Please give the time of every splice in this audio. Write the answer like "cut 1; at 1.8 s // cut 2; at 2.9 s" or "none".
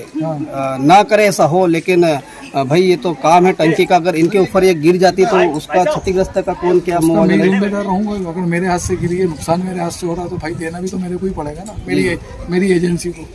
none